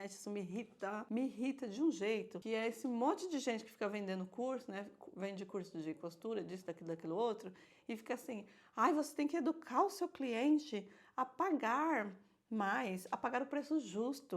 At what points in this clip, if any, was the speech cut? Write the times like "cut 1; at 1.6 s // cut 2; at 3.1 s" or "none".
cut 1; at 1.0 s // cut 2; at 2.3 s